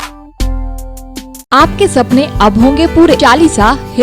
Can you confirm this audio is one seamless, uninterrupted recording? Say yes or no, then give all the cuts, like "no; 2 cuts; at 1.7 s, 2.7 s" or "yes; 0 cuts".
no; 2 cuts; at 1.4 s, 3.2 s